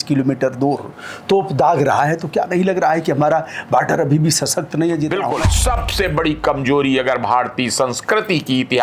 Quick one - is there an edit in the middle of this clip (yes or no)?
yes